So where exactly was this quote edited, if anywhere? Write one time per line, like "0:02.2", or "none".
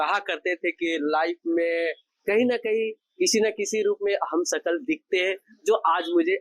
none